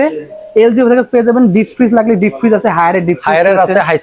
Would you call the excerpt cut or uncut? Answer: uncut